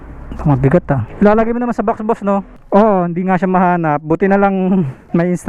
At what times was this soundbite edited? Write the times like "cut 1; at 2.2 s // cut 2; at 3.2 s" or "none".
cut 1; at 2.6 s